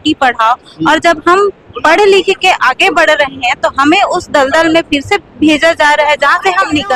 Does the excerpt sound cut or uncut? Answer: uncut